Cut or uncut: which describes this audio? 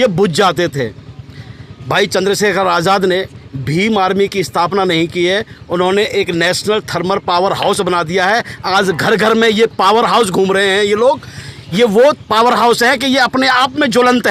uncut